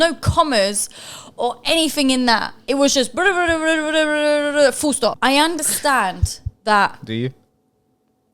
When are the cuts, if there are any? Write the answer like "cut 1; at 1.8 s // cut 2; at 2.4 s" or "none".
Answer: cut 1; at 5.2 s